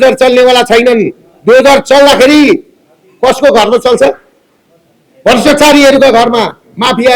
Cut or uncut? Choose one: uncut